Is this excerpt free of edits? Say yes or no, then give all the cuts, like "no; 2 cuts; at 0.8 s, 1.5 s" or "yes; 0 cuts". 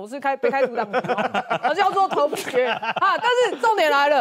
yes; 0 cuts